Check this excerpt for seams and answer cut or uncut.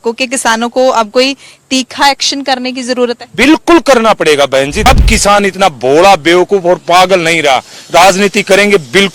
cut